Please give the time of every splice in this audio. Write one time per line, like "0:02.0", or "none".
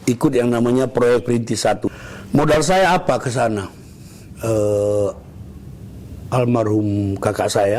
0:01.9